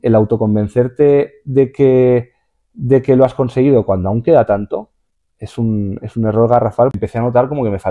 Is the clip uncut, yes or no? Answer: no